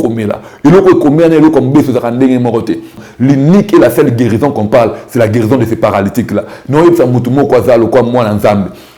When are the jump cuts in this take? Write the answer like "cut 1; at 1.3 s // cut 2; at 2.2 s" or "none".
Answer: cut 1; at 2.9 s

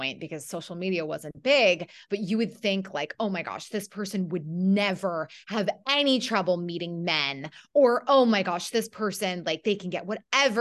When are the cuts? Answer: none

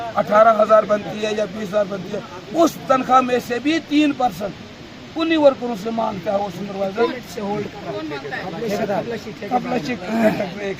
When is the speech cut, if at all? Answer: none

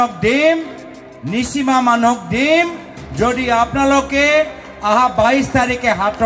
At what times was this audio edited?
none

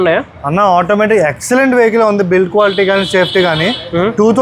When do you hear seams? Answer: none

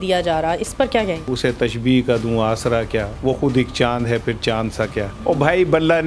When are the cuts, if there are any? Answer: cut 1; at 1.3 s // cut 2; at 3.1 s // cut 3; at 5.1 s

